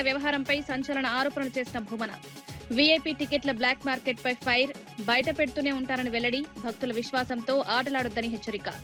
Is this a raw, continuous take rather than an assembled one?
yes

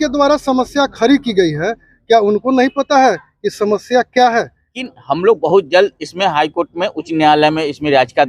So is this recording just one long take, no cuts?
no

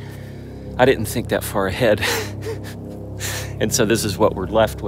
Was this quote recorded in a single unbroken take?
yes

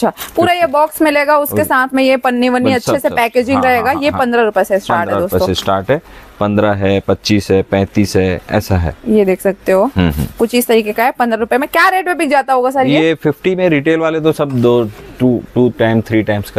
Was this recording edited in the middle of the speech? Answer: no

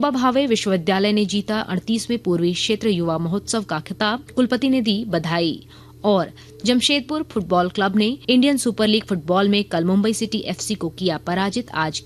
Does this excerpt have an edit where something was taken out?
yes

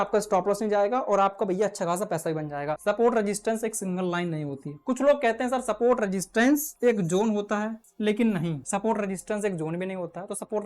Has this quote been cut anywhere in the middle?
yes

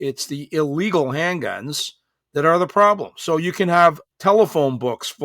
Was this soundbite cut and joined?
yes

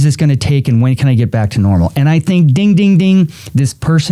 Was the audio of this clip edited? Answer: no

